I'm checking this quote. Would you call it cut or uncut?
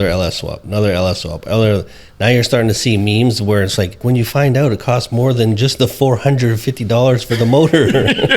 cut